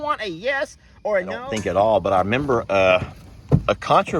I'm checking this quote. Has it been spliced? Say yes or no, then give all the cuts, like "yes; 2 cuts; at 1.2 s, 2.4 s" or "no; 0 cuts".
yes; 1 cut; at 1.4 s